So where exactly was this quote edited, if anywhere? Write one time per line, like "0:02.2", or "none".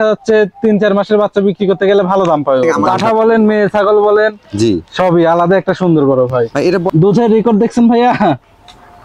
0:02.8
0:06.9